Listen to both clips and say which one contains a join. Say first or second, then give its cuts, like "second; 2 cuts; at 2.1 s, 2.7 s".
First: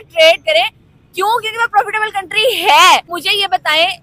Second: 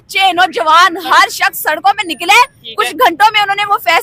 first; 1 cut; at 3.1 s